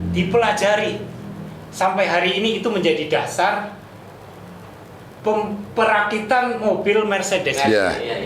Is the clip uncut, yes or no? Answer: yes